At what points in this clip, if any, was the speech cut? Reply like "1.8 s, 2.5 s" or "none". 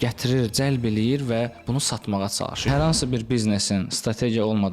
2.7 s